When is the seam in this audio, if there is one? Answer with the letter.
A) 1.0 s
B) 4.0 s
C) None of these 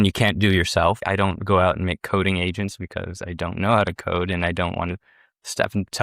A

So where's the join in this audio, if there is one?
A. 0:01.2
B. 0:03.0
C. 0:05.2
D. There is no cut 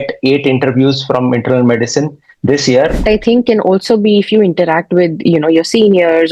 B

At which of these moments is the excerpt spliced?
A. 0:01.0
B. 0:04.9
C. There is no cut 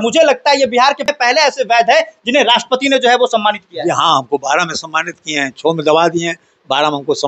A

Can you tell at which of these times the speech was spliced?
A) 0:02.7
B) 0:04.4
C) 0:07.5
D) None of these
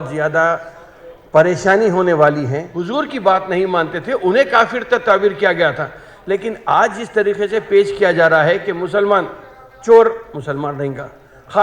A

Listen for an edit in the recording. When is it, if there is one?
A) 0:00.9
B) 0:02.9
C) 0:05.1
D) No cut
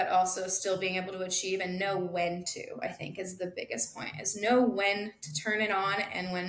D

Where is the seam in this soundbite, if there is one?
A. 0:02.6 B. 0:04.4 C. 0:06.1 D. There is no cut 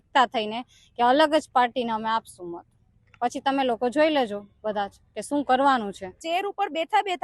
C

